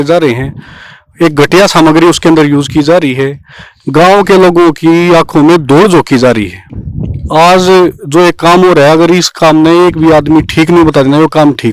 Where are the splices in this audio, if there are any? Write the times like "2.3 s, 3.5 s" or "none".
6.6 s